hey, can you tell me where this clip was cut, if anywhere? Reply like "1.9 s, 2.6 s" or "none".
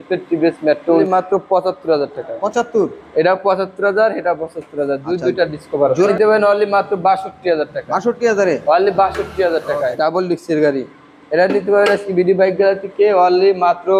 1.0 s, 6.0 s, 9.8 s